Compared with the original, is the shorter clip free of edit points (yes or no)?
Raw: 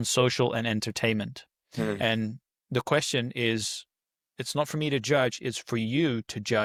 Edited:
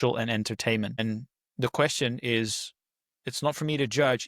no